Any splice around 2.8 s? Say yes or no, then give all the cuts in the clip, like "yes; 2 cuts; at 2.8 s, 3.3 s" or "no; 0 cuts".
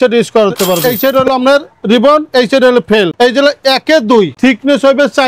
no; 2 cuts; at 0.9 s, 4.3 s